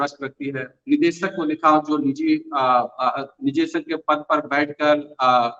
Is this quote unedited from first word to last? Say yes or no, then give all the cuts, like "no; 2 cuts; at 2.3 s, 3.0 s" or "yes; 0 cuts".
yes; 0 cuts